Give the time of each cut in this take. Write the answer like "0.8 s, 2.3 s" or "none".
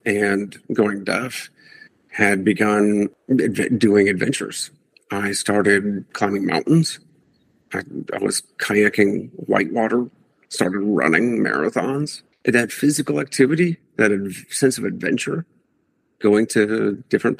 3.2 s, 6.1 s, 12.2 s